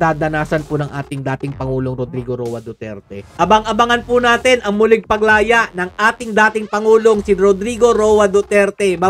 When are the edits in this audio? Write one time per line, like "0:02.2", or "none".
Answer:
0:03.3